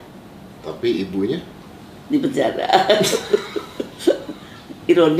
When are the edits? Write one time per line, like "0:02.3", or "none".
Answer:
none